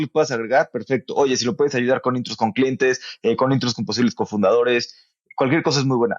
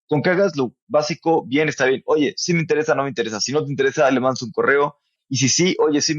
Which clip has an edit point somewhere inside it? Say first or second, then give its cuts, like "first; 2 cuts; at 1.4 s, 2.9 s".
second; 1 cut; at 5.1 s